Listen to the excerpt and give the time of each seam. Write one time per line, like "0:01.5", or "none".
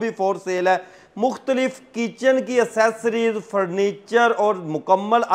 none